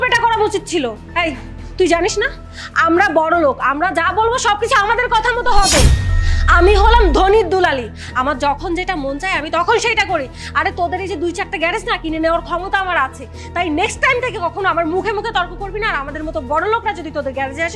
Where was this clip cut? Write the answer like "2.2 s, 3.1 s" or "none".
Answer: none